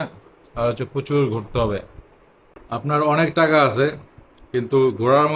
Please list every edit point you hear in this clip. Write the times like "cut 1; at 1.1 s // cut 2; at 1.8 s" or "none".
none

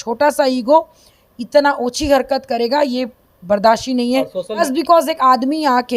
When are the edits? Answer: cut 1; at 4.7 s

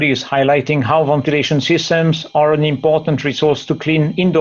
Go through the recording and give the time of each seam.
none

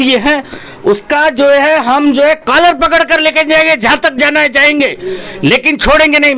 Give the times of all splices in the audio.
none

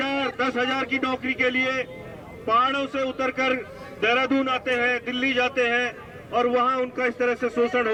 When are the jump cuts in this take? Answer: none

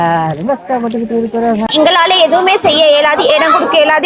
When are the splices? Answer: cut 1; at 1.7 s

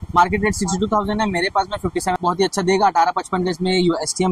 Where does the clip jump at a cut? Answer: cut 1; at 2.2 s

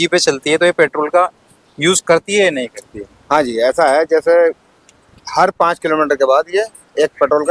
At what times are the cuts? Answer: none

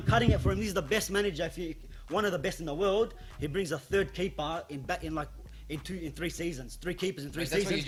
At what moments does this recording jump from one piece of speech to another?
none

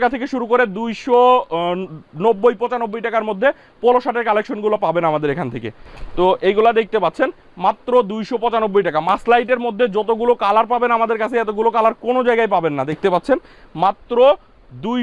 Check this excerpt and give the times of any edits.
none

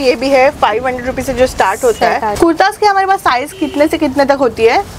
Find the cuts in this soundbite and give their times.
cut 1; at 2.3 s

